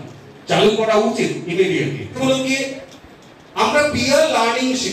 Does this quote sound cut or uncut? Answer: uncut